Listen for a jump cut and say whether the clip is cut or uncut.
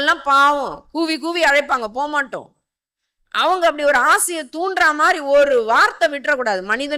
uncut